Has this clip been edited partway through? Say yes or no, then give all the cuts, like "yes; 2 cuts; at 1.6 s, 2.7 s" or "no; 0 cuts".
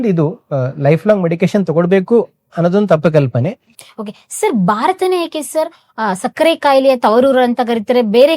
yes; 1 cut; at 3.6 s